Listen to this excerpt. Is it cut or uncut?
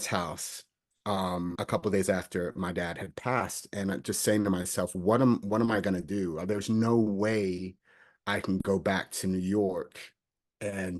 uncut